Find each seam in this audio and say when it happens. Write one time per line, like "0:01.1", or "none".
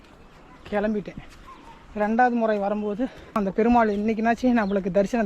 0:03.4

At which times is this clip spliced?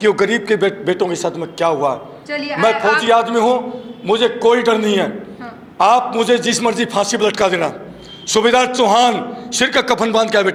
none

